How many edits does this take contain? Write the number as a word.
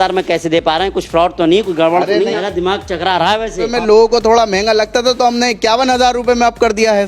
two